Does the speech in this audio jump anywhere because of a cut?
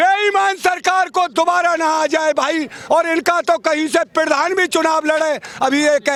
no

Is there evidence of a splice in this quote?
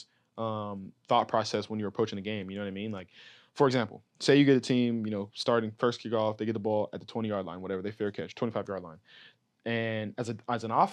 no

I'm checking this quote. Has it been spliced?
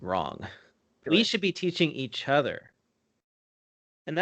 yes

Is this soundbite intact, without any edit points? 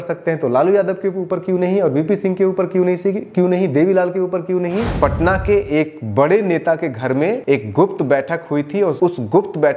no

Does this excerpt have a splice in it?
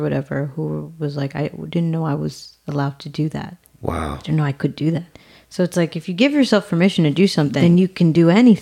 yes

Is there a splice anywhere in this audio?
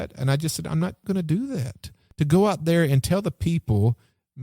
yes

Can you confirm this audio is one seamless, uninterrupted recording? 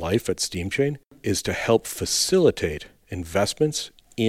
no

